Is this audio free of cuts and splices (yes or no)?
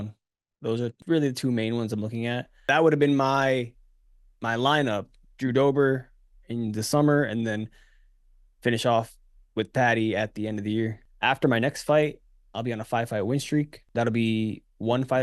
no